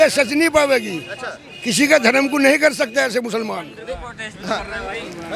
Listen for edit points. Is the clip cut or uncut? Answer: uncut